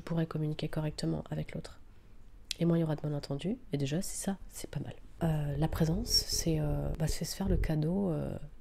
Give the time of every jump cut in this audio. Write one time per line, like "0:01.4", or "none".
0:05.0

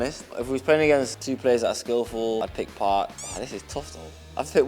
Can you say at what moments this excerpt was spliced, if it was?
0:01.2
0:02.4

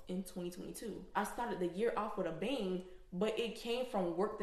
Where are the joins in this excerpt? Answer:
0:01.1

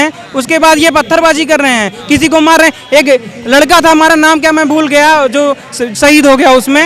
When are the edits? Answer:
none

